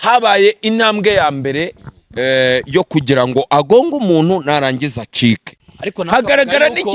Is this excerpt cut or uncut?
cut